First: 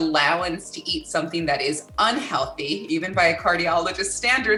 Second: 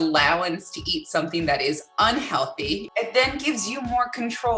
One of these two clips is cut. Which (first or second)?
second